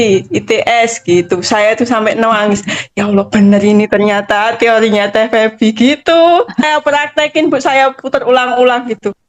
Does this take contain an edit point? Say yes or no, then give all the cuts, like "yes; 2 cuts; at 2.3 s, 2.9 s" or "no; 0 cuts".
yes; 1 cut; at 6.6 s